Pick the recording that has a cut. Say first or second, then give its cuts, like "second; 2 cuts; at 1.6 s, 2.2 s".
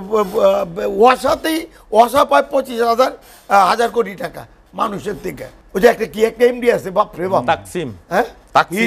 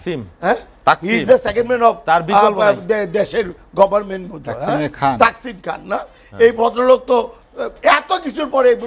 first; 1 cut; at 5.5 s